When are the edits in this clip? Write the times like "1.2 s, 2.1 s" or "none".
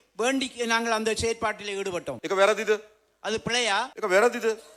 2.1 s